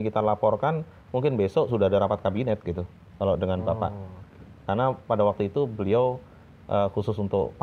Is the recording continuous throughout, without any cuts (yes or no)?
yes